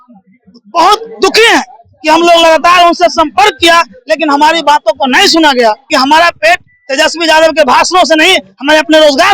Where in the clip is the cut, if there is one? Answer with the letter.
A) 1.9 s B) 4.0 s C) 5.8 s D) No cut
C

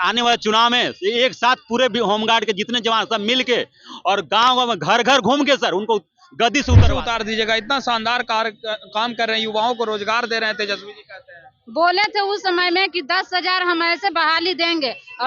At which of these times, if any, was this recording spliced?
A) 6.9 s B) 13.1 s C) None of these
A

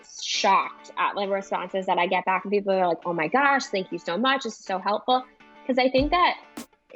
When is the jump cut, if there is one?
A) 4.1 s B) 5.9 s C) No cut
C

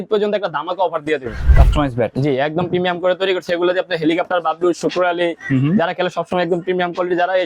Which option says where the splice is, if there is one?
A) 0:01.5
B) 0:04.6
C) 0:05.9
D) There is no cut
A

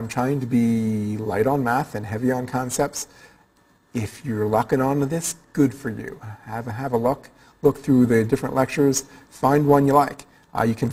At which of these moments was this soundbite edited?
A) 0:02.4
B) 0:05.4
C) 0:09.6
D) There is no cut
A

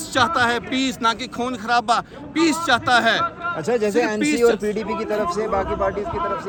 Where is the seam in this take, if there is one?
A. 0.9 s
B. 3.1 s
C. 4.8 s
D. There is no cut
D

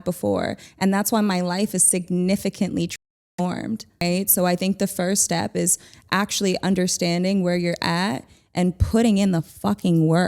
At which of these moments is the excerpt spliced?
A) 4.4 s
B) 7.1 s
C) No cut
A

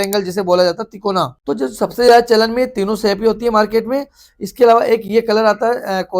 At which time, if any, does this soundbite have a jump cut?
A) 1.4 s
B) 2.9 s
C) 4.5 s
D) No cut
A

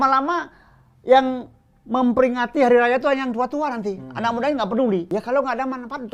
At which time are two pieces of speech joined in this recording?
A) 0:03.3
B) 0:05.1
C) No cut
B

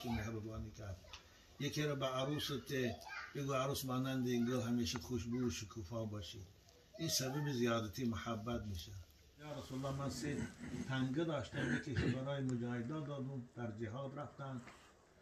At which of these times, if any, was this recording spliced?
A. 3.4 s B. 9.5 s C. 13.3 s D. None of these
B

